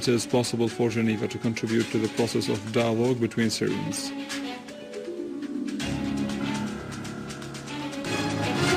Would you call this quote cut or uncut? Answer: cut